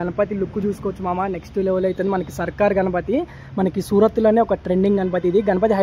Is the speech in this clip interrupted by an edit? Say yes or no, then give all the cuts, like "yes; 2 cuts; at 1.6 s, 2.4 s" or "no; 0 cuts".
no; 0 cuts